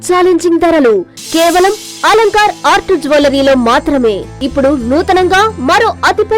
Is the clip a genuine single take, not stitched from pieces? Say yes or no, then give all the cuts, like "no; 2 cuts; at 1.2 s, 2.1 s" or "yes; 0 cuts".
no; 1 cut; at 4.4 s